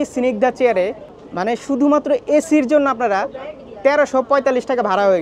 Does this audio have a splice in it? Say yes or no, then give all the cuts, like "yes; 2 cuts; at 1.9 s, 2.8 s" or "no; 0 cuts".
no; 0 cuts